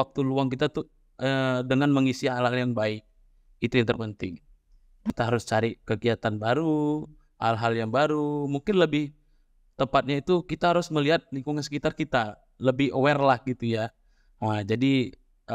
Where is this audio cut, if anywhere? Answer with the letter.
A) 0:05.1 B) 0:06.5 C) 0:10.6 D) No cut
A